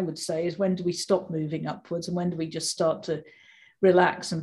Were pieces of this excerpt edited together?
no; 0 cuts

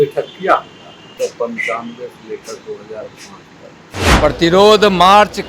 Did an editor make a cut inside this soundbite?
yes; 2 cuts; at 1.1 s, 4.0 s

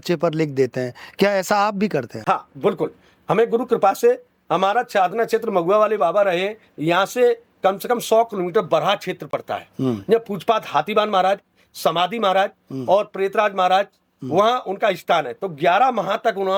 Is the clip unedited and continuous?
yes; 0 cuts

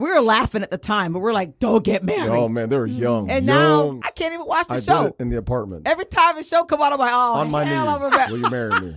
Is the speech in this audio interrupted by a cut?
yes; 1 cut; at 4.0 s

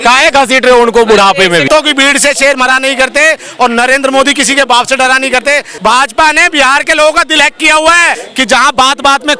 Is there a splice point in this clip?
yes; 3 cuts; at 1.7 s, 5.7 s, 8.2 s

